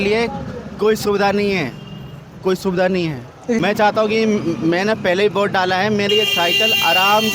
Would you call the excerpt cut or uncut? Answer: cut